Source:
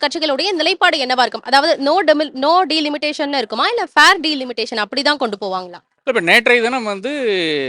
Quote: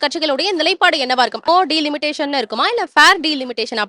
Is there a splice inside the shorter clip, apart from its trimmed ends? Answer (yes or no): yes